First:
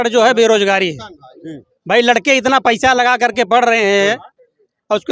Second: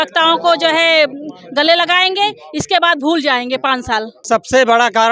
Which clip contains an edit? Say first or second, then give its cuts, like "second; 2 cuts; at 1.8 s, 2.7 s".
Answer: second; 1 cut; at 4.1 s